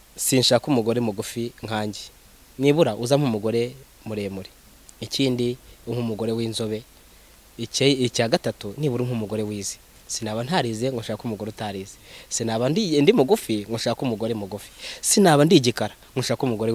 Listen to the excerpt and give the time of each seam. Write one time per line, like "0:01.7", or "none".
none